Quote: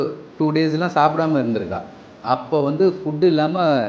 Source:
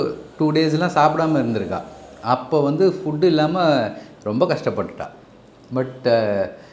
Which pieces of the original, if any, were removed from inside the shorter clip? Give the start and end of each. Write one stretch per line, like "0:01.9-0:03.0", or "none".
none